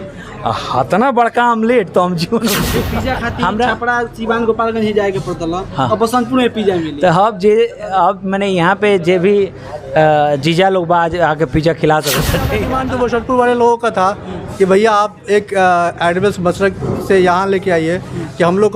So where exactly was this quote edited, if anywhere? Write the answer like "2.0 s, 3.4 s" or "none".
2.9 s, 12.6 s